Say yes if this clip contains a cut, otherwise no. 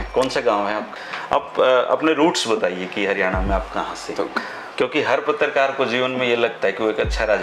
yes